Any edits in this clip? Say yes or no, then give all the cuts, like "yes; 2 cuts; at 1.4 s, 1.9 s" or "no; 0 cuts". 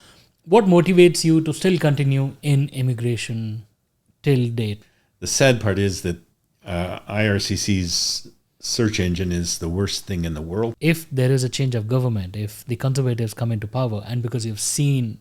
yes; 2 cuts; at 4.9 s, 10.8 s